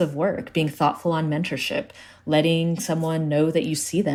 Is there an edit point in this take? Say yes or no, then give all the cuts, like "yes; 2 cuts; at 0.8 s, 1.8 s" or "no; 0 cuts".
no; 0 cuts